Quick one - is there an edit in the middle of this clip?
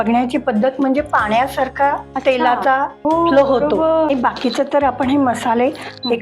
yes; 3 cuts; at 2.1 s, 2.9 s, 4.1 s

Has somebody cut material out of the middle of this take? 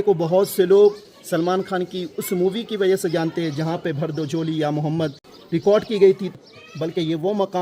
yes; 2 cuts; at 5.3 s, 6.3 s

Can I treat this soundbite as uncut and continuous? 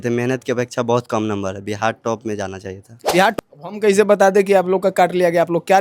no; 1 cut; at 3.3 s

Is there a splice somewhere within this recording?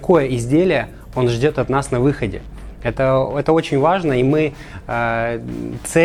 no; 0 cuts

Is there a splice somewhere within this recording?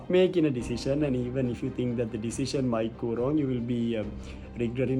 no; 0 cuts

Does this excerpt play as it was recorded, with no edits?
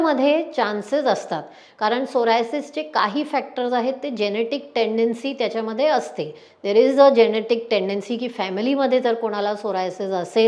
yes; 0 cuts

